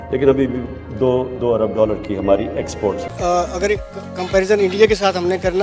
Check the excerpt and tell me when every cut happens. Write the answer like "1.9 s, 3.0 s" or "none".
3.1 s